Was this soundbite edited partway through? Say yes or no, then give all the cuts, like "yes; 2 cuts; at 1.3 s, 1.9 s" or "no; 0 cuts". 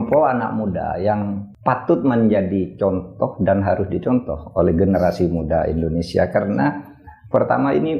yes; 1 cut; at 1.5 s